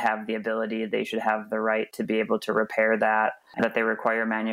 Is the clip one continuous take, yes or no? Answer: no